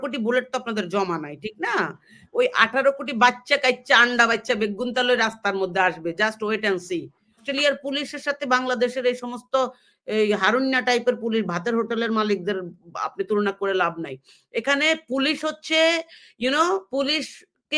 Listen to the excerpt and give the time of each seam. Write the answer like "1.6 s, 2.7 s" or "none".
7.4 s